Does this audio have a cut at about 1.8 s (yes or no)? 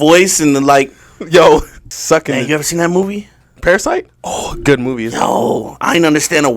yes